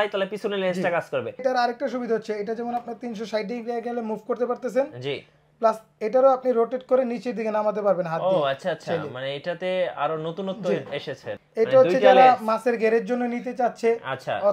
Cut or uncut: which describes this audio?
cut